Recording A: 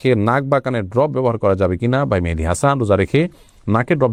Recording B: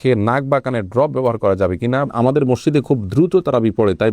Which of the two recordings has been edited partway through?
B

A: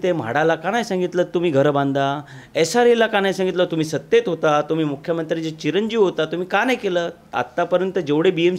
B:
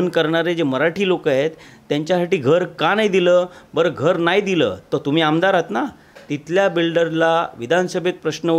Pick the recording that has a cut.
A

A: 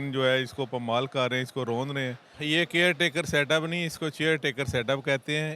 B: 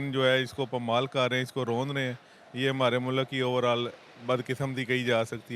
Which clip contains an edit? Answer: A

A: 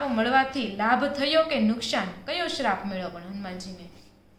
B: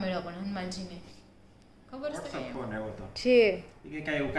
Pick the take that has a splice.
B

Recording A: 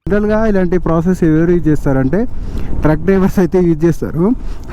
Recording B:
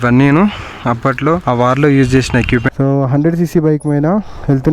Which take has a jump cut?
B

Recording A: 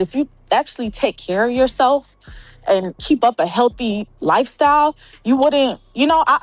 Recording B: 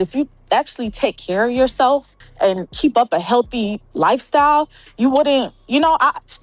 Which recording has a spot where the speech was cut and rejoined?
B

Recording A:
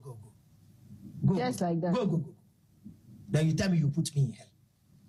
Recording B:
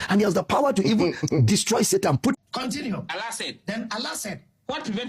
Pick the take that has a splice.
B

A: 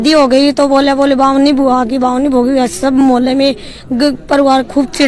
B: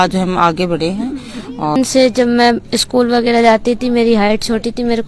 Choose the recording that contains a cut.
B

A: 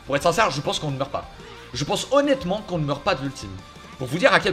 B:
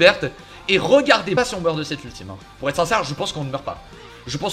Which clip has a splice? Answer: B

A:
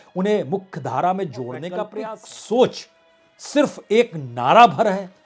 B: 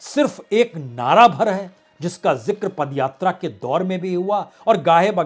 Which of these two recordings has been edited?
A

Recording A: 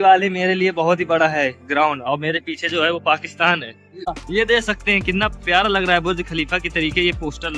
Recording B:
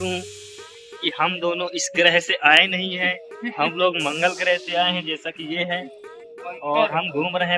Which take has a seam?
A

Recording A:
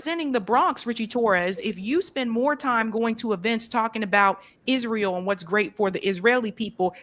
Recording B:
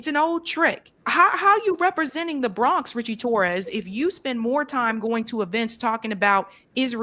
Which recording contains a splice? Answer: B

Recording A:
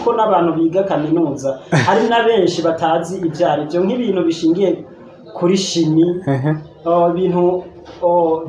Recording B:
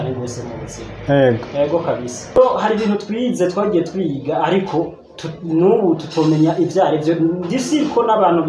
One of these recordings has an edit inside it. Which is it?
B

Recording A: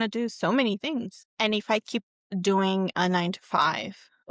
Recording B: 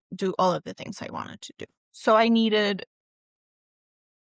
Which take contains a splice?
A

